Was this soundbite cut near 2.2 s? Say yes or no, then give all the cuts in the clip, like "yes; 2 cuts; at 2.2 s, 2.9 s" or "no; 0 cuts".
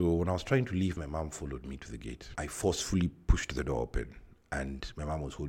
yes; 1 cut; at 2.2 s